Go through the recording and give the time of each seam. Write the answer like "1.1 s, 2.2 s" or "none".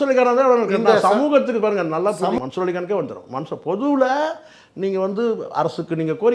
2.4 s